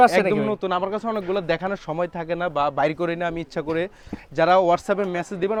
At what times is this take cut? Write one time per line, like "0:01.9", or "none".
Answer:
none